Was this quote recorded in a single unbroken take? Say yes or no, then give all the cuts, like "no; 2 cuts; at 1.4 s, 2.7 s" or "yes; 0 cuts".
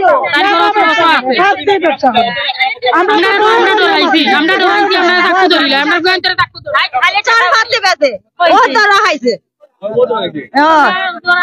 yes; 0 cuts